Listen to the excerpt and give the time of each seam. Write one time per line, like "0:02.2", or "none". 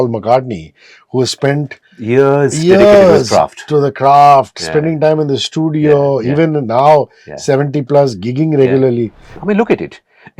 0:09.3